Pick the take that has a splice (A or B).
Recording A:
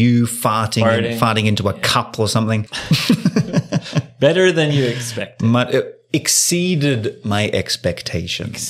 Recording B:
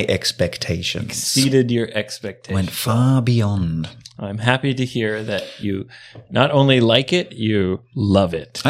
A